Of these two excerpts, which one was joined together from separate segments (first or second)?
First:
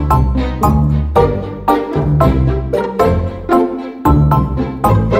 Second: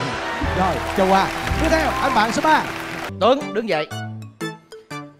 second